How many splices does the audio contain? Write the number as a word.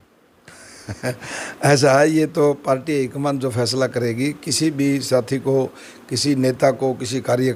zero